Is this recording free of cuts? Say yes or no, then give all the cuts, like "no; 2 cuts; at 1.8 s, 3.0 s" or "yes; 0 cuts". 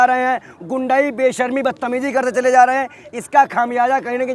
yes; 0 cuts